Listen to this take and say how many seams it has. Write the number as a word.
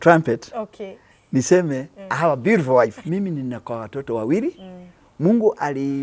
one